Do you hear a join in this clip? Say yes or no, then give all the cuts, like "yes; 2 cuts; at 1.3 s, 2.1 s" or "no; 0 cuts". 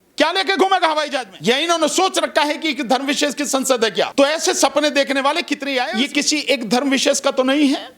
yes; 3 cuts; at 1.3 s, 4.1 s, 5.9 s